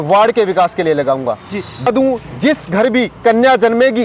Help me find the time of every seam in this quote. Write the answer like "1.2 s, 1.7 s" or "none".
1.9 s